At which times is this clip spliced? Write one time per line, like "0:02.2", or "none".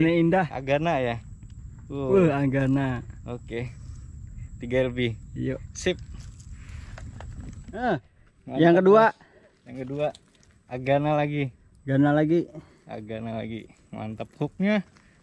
0:07.9